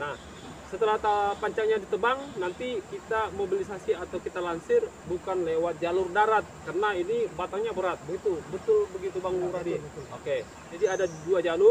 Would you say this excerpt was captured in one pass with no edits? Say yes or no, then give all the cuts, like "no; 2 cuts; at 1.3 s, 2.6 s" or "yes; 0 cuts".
no; 1 cut; at 10.7 s